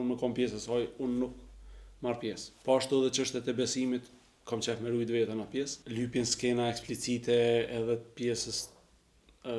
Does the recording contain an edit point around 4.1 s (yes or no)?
no